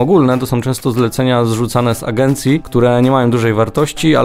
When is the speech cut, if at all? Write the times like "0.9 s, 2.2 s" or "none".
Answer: 2.7 s